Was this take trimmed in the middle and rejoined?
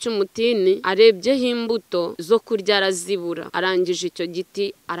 yes; 3 cuts; at 0.8 s, 2.2 s, 3.4 s

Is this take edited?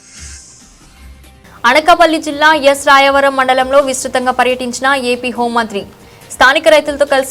no; 0 cuts

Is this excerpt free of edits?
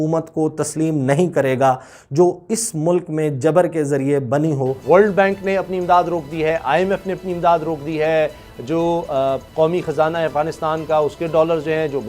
no; 1 cut; at 4.8 s

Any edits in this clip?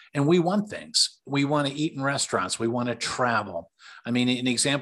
yes; 1 cut; at 1.2 s

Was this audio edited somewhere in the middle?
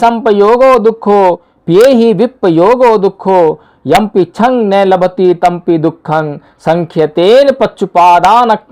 yes; 1 cut; at 1.5 s

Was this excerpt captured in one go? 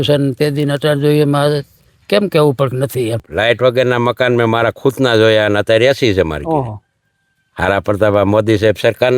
no; 1 cut; at 3.3 s

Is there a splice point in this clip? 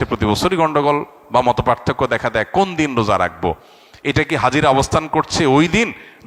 no; 0 cuts

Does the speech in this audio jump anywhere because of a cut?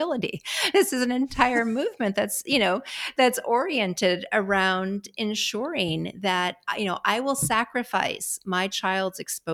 no; 0 cuts

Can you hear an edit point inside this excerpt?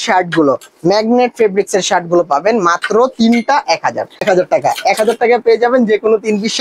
yes; 1 cut; at 4.2 s

